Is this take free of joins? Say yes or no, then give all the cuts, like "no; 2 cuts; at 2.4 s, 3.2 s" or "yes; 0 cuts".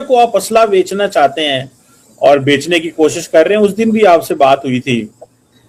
yes; 0 cuts